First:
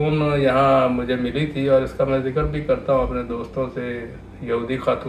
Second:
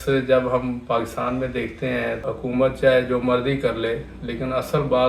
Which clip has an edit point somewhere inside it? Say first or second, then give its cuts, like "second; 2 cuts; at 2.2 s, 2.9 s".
second; 1 cut; at 2.2 s